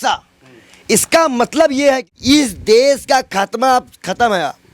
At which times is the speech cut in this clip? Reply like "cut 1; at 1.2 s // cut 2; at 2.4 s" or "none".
cut 1; at 2.1 s